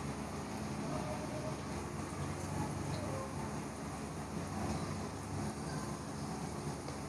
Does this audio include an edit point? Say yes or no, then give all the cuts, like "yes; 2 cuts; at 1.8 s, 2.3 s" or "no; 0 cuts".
yes; 1 cut; at 1.8 s